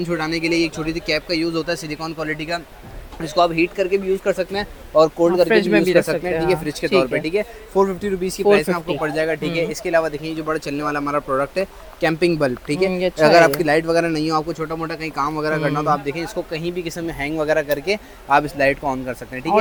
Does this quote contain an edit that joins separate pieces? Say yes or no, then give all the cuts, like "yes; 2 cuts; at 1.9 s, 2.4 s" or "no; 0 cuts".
no; 0 cuts